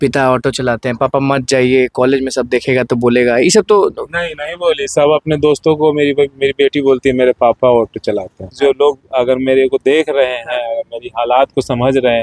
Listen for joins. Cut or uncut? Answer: cut